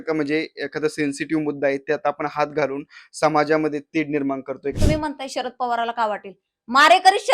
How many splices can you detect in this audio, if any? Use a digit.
1